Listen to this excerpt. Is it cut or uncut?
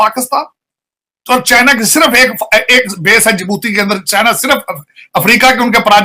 uncut